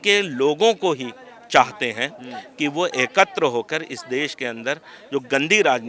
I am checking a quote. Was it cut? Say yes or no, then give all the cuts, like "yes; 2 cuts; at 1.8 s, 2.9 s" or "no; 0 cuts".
no; 0 cuts